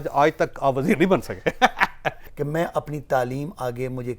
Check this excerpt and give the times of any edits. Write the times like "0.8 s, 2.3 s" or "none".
2.2 s